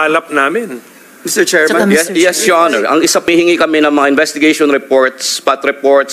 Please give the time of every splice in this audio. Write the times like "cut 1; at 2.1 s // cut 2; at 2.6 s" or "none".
cut 1; at 3.3 s

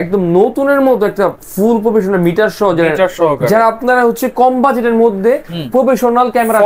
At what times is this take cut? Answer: none

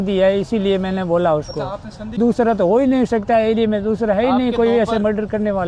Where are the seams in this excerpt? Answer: cut 1; at 2.2 s

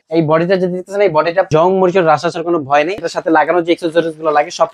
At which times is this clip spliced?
cut 1; at 1.5 s // cut 2; at 3.0 s

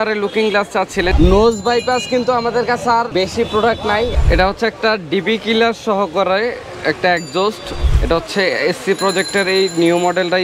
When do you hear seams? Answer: cut 1; at 1.1 s // cut 2; at 3.1 s // cut 3; at 4.1 s // cut 4; at 7.9 s

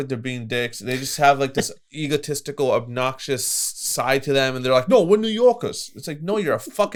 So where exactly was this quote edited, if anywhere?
none

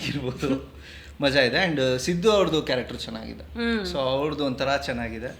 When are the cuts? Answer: none

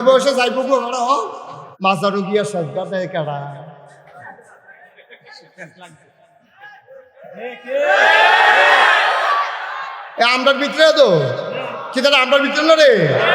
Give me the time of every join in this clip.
cut 1; at 1.7 s

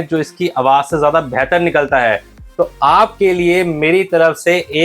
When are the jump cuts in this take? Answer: none

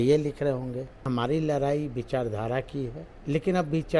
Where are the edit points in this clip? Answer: cut 1; at 1.1 s // cut 2; at 3.1 s

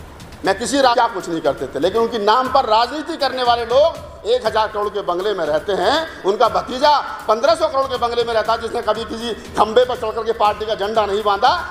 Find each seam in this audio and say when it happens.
cut 1; at 0.9 s

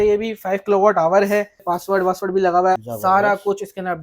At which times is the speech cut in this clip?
cut 1; at 1.6 s // cut 2; at 2.8 s

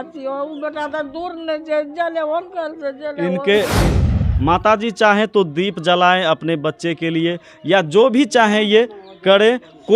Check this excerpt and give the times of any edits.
cut 1; at 3.9 s

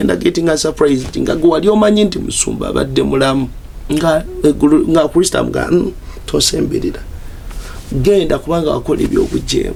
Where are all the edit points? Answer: none

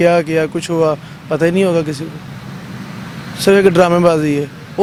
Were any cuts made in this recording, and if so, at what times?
none

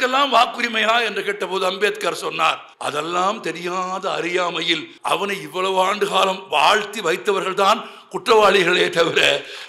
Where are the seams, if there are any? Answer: cut 1; at 2.7 s // cut 2; at 4.9 s

